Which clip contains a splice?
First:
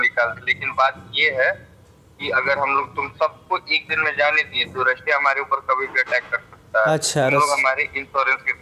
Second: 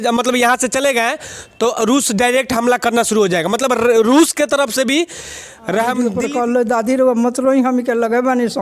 second; 1 cut; at 6.1 s

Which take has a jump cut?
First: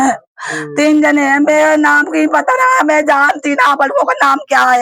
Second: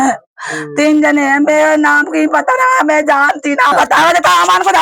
second; 1 cut; at 3.7 s

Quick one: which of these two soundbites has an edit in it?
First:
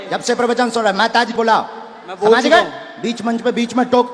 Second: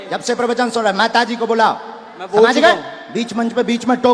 first; 1 cut; at 1.3 s

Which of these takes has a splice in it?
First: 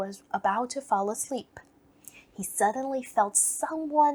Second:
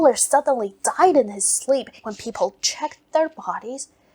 second; 1 cut; at 2.0 s

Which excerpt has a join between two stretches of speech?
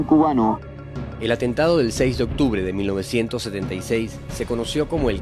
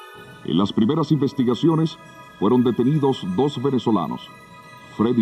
first; 1 cut; at 2.4 s

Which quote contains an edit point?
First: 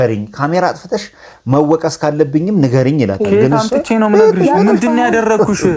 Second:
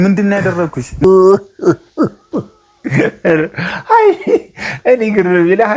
second; 1 cut; at 1.0 s

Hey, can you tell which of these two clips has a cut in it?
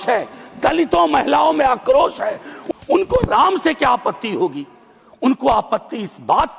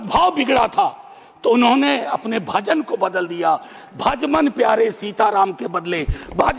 first; 1 cut; at 2.5 s

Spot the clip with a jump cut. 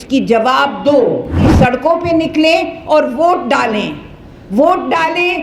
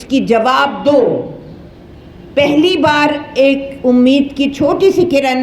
first; 1 cut; at 1.5 s

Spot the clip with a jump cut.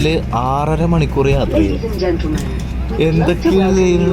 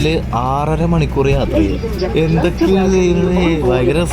second; 1 cut; at 2.0 s

